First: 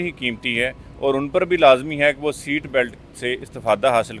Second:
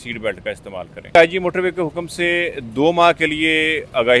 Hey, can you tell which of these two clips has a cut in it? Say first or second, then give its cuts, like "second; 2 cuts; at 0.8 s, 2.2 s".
second; 1 cut; at 1.1 s